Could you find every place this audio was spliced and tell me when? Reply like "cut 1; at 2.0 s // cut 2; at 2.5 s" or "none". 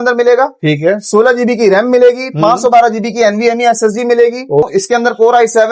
cut 1; at 4.7 s